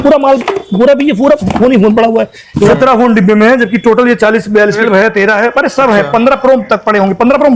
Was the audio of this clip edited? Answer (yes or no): yes